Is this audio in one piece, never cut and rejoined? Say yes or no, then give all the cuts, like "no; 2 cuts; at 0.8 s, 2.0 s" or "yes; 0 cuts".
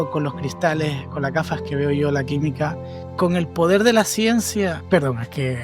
no; 1 cut; at 3.0 s